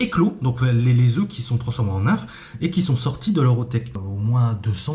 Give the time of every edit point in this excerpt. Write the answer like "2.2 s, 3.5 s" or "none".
4.0 s